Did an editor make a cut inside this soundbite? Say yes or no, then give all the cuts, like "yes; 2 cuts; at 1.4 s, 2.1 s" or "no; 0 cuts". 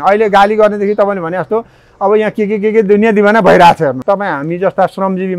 yes; 1 cut; at 4.0 s